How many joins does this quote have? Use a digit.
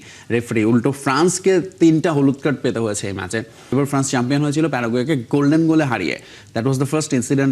1